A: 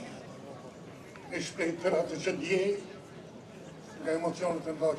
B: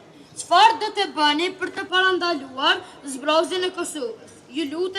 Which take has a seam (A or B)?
B